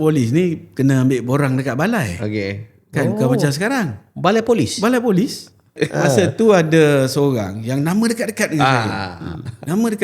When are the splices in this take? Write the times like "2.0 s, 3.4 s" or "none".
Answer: 5.7 s